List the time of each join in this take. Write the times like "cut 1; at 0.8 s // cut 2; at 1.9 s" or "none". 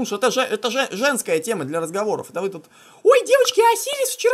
none

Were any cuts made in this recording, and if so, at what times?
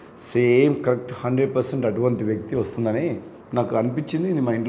cut 1; at 3.3 s

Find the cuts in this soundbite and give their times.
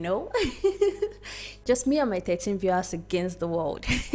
cut 1; at 1.5 s

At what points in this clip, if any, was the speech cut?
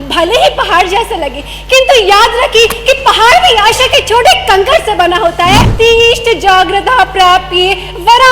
cut 1; at 5.7 s

